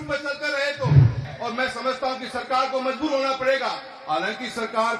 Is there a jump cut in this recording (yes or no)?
yes